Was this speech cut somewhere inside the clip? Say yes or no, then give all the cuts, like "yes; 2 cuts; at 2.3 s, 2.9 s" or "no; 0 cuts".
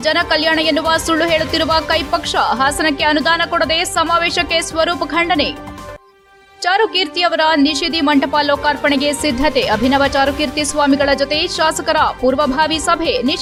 no; 0 cuts